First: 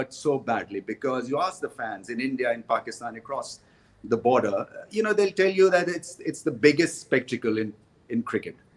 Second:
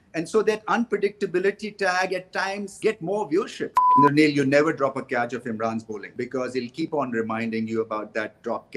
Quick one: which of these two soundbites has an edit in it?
second; 3 cuts; at 2.7 s, 3.8 s, 6.0 s

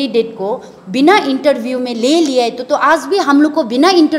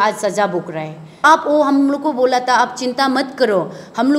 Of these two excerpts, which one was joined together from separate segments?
second; 1 cut; at 1.2 s

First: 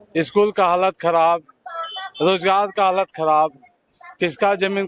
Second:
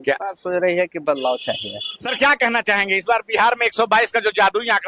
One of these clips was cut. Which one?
second; 1 cut; at 2.1 s

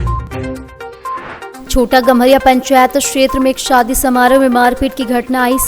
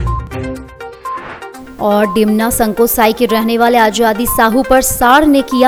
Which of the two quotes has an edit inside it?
first; 1 cut; at 1.6 s

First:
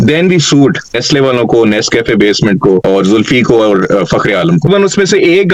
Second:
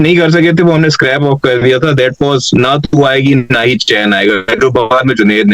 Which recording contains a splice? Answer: first; 3 cuts; at 1.0 s, 2.8 s, 4.7 s

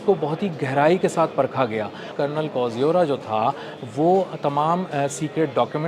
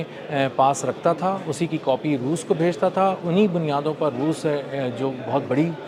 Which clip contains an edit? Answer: first; 1 cut; at 2.1 s

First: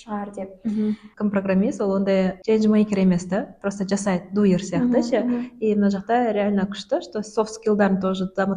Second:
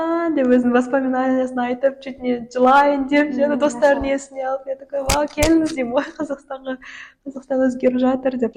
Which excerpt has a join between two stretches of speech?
first; 2 cuts; at 1.1 s, 2.4 s

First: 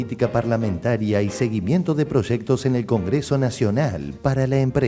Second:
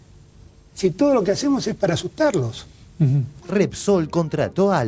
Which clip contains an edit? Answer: second; 1 cut; at 3.3 s

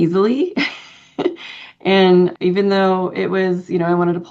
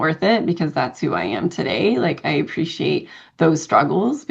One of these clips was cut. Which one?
first; 1 cut; at 2.3 s

